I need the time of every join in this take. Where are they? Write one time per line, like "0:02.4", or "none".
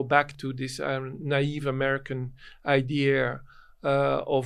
none